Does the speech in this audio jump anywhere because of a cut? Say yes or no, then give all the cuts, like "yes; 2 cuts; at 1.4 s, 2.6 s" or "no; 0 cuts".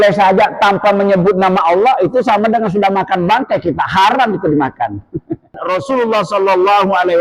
yes; 1 cut; at 5.6 s